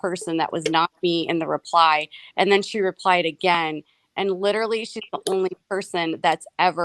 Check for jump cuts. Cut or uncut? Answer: cut